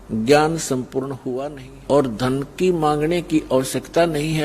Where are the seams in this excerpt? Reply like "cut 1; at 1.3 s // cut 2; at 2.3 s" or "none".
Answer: cut 1; at 1.2 s